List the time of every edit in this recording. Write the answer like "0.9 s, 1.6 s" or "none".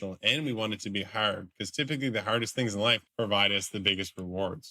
3.0 s